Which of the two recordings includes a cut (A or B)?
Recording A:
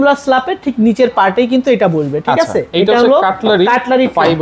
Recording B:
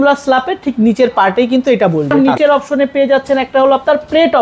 B